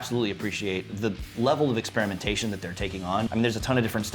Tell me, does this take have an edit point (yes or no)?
yes